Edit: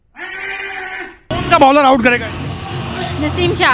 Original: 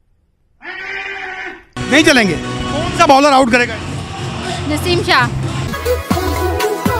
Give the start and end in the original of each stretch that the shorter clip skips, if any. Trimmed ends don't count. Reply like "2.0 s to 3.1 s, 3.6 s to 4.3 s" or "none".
1.8 s to 2.8 s